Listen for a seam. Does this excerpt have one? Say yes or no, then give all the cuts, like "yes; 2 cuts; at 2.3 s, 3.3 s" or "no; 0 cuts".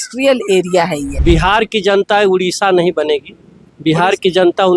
yes; 1 cut; at 1.1 s